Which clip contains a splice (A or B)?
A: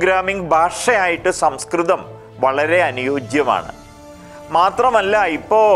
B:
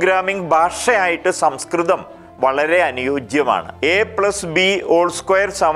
B